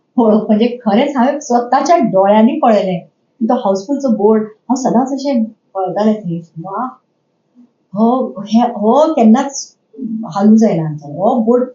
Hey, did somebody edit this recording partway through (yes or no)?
no